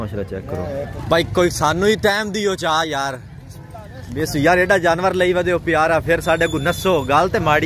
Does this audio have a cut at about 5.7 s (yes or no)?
no